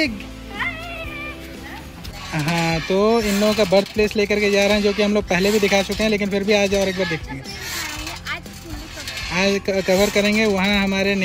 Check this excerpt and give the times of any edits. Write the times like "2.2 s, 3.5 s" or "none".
2.1 s

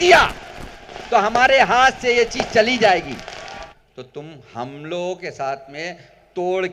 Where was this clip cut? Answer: 3.7 s

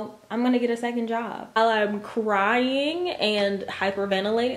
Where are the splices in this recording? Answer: 1.6 s

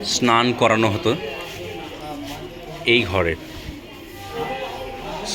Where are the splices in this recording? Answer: none

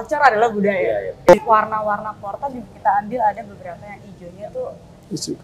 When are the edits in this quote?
1.1 s

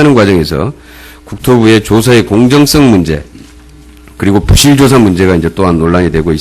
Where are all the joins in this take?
4.7 s

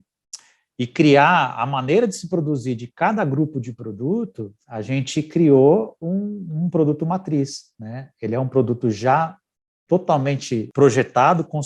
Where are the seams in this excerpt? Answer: 10.7 s

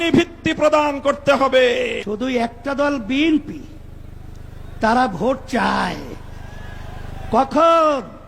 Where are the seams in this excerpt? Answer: 2.0 s

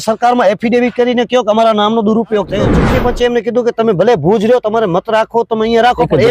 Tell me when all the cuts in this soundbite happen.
2.7 s

